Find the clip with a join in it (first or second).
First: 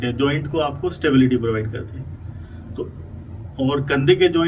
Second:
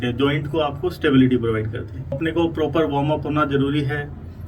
second